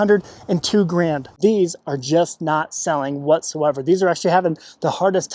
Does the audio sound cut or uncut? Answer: cut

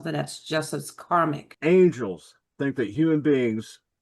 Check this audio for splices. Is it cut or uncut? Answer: cut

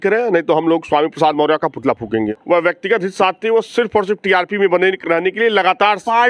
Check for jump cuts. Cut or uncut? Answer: cut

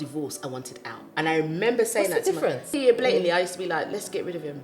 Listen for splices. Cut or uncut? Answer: cut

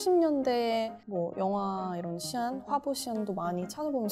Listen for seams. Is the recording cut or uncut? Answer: uncut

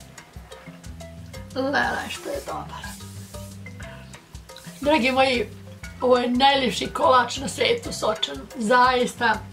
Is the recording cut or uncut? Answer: cut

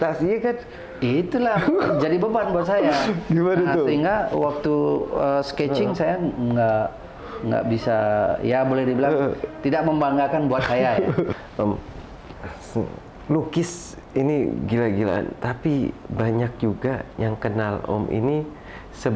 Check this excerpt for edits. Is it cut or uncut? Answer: cut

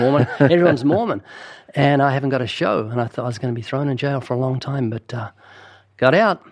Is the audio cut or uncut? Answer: uncut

